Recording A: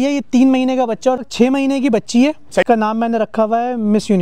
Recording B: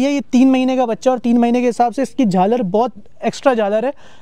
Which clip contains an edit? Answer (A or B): A